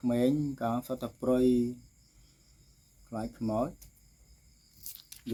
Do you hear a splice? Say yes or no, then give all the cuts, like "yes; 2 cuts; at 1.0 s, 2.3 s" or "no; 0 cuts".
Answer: no; 0 cuts